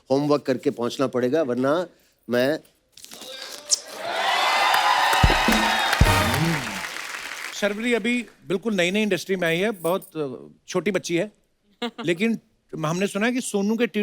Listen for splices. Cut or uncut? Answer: cut